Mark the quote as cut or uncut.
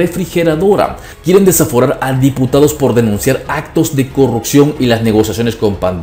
cut